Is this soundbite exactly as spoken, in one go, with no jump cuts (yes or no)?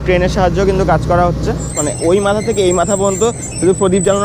no